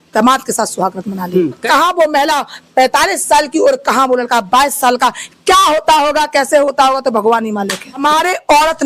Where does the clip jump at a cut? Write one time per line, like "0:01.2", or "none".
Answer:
0:01.6
0:08.0